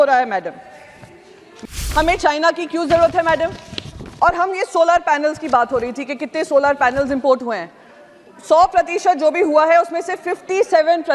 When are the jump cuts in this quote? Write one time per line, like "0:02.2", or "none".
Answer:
0:01.8